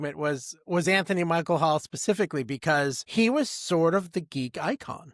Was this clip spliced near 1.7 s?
no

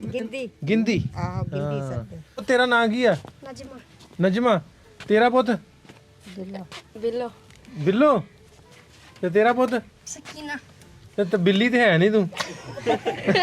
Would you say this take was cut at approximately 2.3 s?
yes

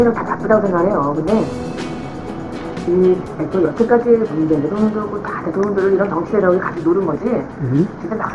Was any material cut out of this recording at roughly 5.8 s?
no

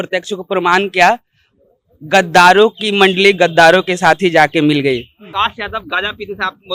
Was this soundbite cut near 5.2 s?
yes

